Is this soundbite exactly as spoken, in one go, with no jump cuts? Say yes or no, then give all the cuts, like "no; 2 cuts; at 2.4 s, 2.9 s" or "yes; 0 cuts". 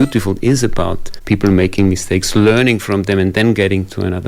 no; 1 cut; at 1.1 s